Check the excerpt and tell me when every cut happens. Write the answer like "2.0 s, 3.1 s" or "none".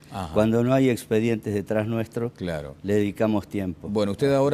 2.4 s

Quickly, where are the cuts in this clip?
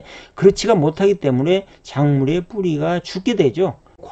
none

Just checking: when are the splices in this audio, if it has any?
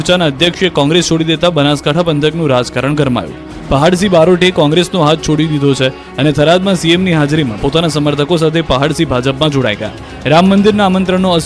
2.7 s

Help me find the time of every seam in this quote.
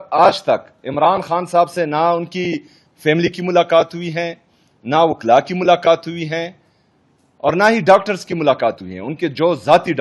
none

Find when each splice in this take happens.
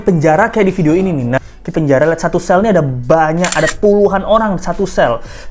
1.7 s

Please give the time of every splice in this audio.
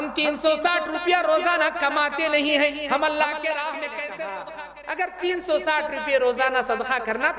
4.5 s

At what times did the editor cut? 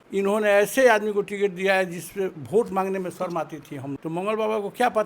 3.9 s

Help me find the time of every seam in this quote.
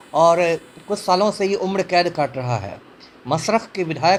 none

